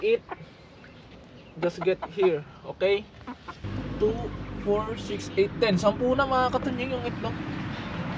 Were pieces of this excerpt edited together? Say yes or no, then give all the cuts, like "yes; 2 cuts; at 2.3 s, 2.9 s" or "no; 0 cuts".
yes; 1 cut; at 3.6 s